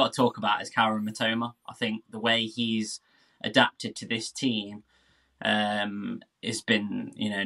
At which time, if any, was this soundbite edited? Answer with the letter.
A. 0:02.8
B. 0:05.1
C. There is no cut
C